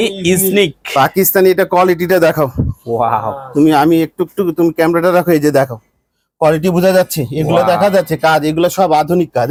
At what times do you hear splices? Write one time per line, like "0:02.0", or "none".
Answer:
none